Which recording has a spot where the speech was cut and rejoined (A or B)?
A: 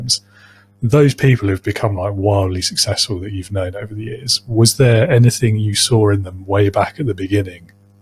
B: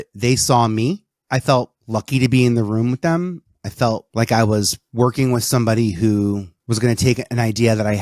B